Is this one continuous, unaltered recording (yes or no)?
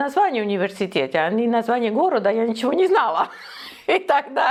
yes